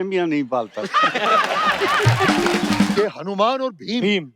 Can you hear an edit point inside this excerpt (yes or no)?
yes